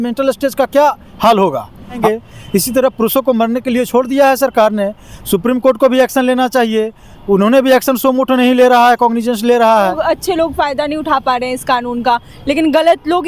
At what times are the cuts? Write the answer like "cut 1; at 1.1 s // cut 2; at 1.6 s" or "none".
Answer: cut 1; at 2.0 s // cut 2; at 10.0 s